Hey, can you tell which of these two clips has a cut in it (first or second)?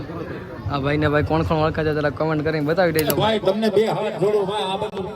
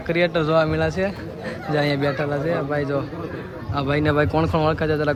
first